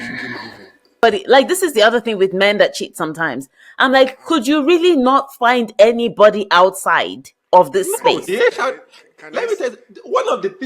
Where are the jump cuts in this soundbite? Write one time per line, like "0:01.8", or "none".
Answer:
0:01.0